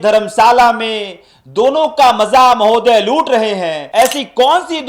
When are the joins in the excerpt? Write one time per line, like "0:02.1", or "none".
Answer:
0:03.8